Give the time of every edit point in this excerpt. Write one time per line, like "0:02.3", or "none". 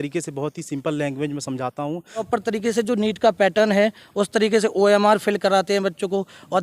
0:02.3